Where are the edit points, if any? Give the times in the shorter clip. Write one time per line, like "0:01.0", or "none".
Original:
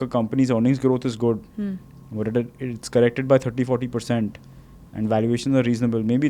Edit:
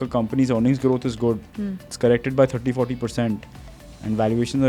0:01.8